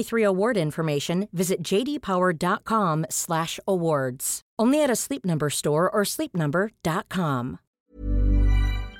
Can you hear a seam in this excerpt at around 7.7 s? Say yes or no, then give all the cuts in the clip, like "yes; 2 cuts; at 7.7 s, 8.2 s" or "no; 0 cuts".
yes; 1 cut; at 7.7 s